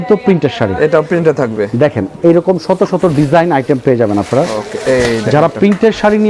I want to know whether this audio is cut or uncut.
uncut